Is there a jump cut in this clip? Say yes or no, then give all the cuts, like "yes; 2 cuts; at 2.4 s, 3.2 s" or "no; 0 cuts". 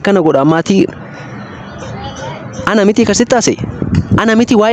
no; 0 cuts